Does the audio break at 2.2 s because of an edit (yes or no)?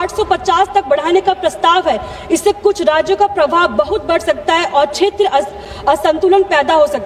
no